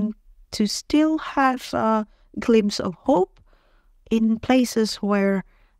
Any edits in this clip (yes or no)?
no